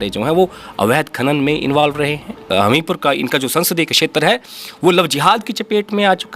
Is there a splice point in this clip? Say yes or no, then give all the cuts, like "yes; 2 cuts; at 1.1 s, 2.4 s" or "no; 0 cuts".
yes; 1 cut; at 2.5 s